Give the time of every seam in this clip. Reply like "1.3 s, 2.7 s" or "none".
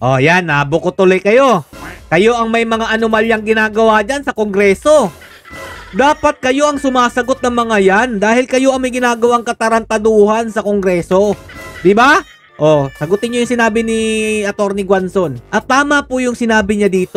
none